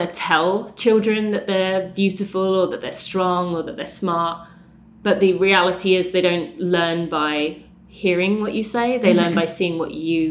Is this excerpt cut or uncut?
uncut